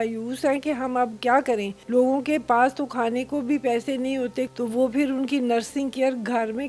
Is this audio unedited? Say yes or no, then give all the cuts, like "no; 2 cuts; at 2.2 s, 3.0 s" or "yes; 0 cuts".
no; 2 cuts; at 1.8 s, 4.5 s